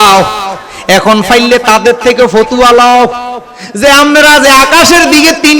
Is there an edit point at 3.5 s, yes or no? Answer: no